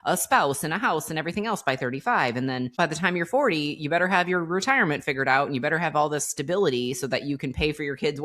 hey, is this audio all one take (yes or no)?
no